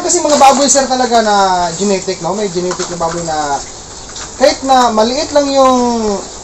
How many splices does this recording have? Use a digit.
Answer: 0